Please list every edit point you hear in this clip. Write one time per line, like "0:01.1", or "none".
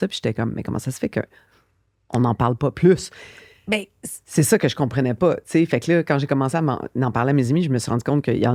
none